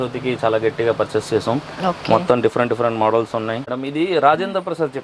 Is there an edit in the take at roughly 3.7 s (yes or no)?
yes